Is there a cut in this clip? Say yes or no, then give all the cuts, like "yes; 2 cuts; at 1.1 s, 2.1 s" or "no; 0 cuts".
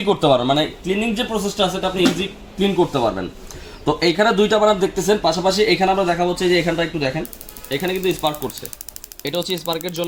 no; 0 cuts